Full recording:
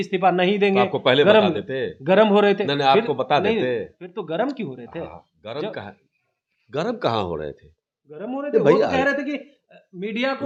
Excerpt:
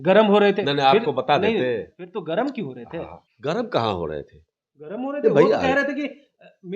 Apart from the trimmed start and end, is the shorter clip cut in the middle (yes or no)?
yes